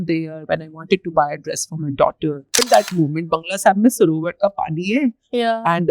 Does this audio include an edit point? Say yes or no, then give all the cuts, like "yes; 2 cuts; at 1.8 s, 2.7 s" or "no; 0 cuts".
yes; 1 cut; at 2.5 s